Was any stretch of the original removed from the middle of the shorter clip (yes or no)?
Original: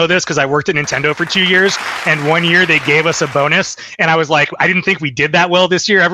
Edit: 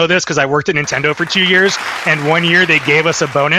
no